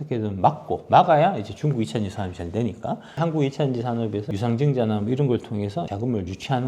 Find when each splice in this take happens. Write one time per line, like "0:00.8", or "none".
0:03.1
0:04.3
0:05.9